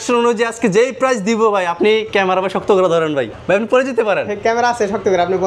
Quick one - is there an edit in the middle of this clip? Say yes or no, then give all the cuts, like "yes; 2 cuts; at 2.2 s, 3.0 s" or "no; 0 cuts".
yes; 1 cut; at 3.3 s